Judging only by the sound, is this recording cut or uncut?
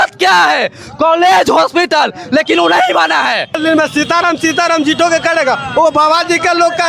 cut